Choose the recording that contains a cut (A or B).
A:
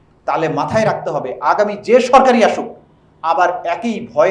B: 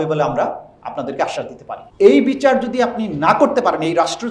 B